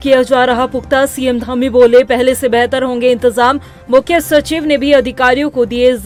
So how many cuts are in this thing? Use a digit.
0